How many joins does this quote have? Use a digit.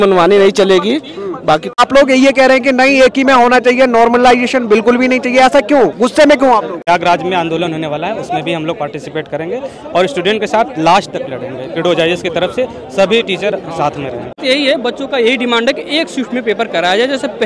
3